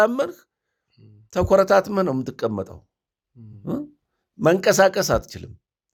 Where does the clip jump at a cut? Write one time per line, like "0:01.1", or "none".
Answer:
none